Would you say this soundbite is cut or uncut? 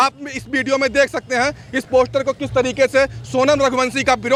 uncut